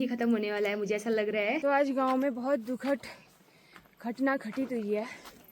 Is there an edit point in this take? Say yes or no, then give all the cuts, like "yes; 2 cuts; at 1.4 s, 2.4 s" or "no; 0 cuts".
yes; 1 cut; at 1.6 s